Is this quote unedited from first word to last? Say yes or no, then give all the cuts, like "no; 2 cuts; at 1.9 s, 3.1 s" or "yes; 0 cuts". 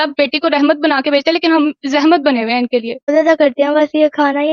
no; 1 cut; at 3.5 s